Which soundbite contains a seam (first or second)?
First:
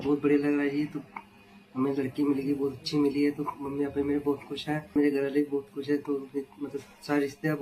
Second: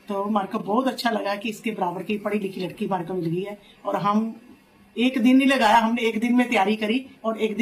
first